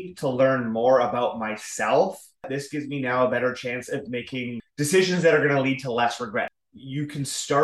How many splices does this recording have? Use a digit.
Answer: 3